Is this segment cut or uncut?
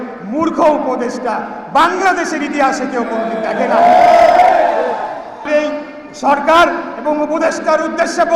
cut